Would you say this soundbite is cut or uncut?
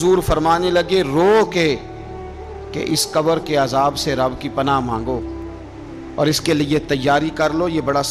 uncut